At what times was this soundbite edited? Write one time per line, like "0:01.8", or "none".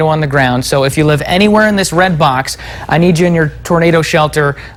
none